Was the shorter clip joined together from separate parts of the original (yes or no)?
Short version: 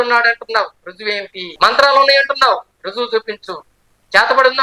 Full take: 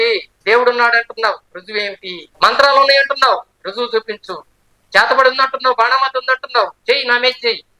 yes